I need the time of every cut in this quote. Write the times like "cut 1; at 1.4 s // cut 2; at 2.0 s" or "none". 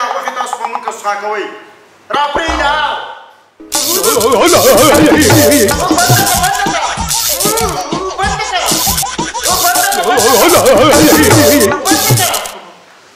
none